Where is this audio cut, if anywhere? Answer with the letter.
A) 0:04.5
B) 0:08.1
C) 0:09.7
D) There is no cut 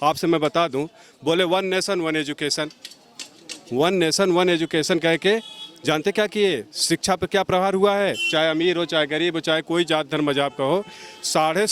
D